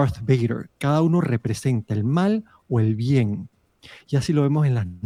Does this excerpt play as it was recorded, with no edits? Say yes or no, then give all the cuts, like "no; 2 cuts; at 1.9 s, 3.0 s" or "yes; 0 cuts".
yes; 0 cuts